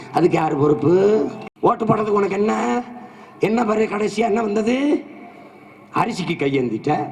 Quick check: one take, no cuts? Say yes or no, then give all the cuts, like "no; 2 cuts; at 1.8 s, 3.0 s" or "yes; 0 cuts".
no; 1 cut; at 1.4 s